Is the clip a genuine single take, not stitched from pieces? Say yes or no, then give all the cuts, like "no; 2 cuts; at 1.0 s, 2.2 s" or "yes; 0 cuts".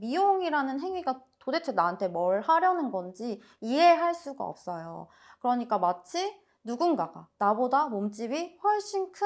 yes; 0 cuts